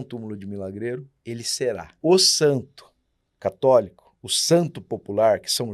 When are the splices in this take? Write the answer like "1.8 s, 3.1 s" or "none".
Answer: 1.9 s